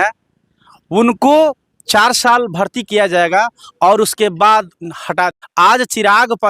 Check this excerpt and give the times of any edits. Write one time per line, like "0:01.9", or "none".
0:05.3